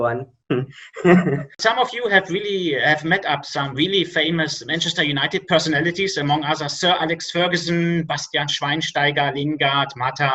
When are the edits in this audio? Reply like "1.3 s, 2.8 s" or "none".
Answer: 1.5 s